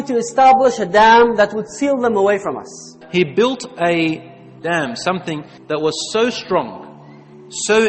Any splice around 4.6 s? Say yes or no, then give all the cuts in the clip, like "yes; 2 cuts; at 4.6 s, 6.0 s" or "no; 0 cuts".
yes; 2 cuts; at 3.0 s, 4.6 s